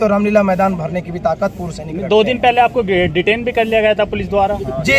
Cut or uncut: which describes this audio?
uncut